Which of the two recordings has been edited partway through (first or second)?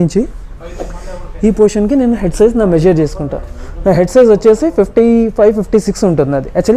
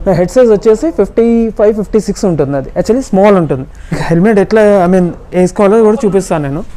second